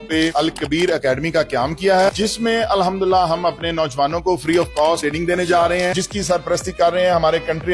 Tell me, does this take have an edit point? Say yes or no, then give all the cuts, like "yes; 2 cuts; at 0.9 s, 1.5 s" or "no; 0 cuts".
yes; 2 cuts; at 2.1 s, 6.0 s